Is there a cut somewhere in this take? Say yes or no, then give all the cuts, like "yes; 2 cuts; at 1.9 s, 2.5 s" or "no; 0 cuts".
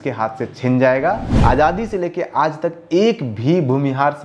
yes; 1 cut; at 1.3 s